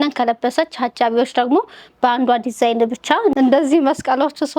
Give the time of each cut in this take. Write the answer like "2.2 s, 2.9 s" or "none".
3.3 s